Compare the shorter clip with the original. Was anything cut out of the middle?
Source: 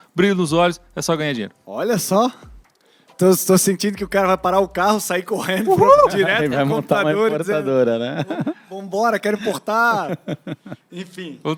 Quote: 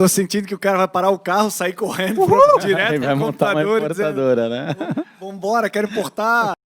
no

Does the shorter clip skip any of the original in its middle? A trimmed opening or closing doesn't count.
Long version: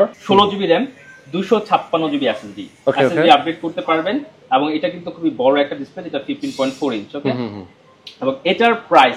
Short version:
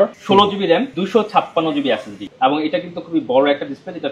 yes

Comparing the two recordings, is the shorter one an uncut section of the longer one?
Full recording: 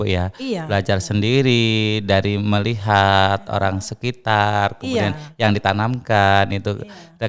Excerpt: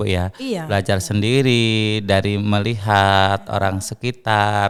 yes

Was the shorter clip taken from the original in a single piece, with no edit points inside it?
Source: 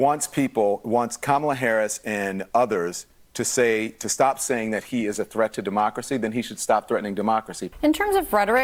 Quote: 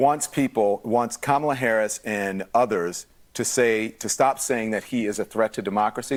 yes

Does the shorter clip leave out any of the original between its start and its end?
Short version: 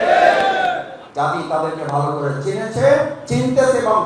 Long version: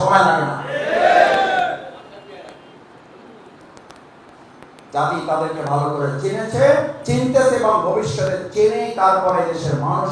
yes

